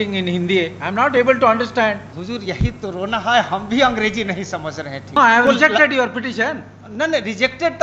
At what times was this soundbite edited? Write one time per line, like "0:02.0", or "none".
0:02.1
0:05.2